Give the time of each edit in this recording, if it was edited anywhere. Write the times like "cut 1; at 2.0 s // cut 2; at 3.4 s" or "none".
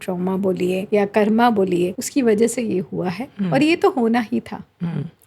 cut 1; at 0.8 s // cut 2; at 2.0 s